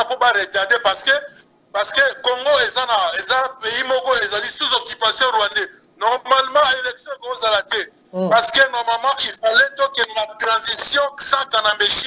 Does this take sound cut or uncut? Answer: cut